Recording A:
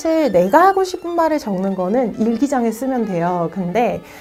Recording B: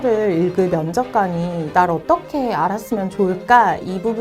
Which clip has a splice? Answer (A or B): B